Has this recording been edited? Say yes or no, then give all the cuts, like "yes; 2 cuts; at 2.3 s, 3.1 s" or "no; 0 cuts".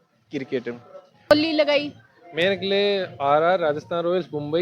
yes; 1 cut; at 1.3 s